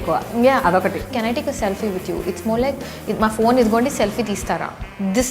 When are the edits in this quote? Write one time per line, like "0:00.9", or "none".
0:01.1